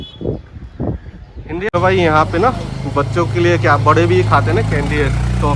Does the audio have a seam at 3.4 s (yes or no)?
no